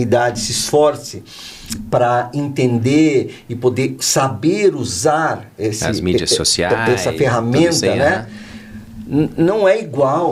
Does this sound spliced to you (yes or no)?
no